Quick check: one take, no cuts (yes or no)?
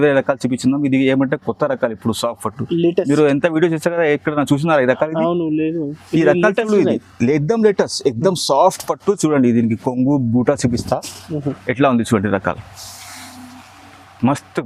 yes